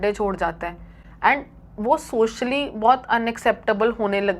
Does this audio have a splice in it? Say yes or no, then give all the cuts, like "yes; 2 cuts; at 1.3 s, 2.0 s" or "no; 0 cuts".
no; 0 cuts